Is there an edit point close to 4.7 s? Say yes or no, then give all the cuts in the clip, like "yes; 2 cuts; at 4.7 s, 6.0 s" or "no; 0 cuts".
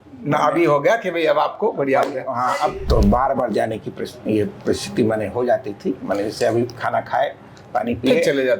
no; 1 cut; at 2.8 s